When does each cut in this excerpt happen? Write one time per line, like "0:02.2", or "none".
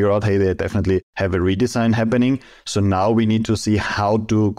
none